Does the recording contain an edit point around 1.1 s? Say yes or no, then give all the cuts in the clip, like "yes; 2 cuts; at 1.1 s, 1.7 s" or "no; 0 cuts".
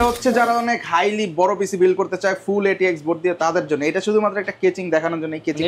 no; 0 cuts